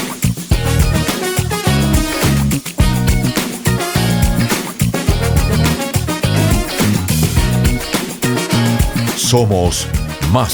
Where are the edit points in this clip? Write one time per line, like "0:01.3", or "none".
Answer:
none